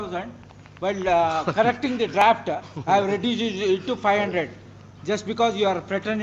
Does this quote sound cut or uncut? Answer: uncut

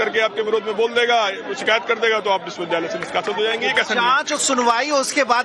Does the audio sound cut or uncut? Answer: uncut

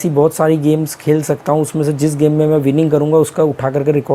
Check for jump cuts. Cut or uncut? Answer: uncut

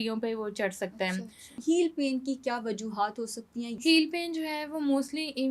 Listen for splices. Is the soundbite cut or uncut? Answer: cut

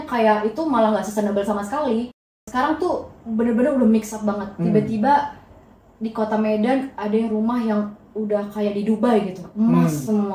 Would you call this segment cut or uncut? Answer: cut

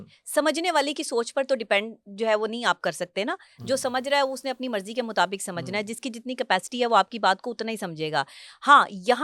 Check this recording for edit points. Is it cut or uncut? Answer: uncut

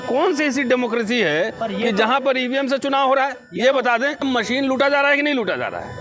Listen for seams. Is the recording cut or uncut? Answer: cut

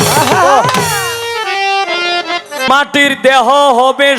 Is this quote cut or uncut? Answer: cut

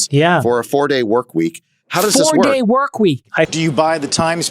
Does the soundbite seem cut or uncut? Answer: cut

